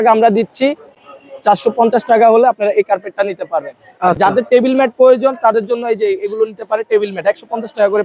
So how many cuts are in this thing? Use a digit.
0